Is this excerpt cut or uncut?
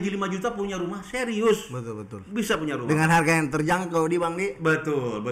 uncut